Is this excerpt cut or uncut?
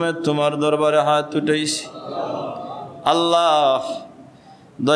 uncut